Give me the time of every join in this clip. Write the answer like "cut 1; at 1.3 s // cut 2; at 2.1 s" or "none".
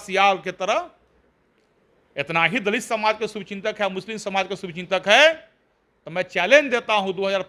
none